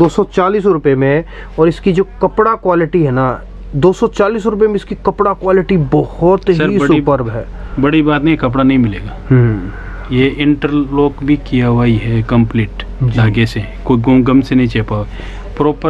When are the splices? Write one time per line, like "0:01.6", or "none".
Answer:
none